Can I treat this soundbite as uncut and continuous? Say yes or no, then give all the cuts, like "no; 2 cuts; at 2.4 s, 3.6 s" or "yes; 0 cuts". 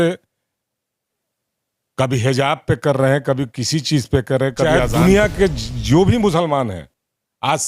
no; 1 cut; at 4.6 s